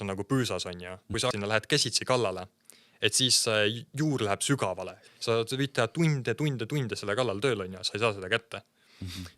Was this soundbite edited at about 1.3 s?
yes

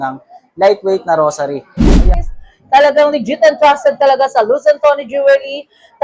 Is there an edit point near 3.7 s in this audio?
no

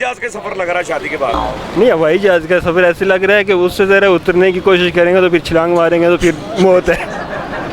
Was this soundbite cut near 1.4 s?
no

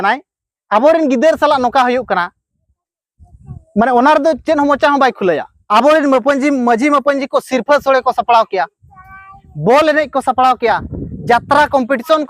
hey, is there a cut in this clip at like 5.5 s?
yes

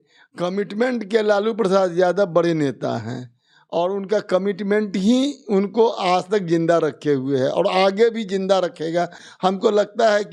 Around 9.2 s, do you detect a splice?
yes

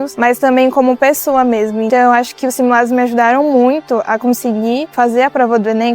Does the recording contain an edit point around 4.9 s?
yes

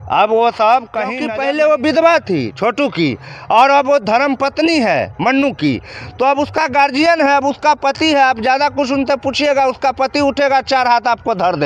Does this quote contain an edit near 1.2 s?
yes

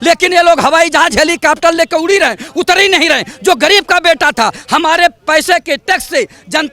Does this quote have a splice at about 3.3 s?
no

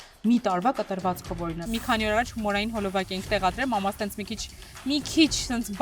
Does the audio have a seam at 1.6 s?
yes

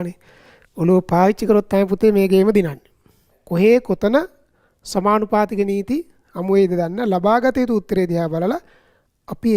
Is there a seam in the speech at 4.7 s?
no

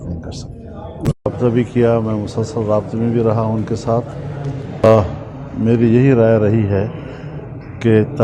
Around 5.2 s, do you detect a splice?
no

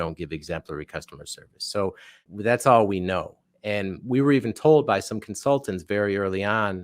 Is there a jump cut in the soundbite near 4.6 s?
no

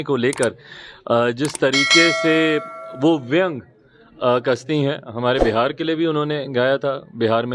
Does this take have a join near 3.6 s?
no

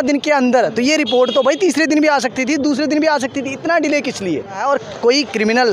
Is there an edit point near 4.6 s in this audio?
yes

